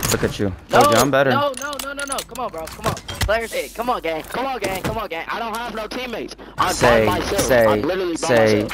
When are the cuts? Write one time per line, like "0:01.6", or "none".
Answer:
none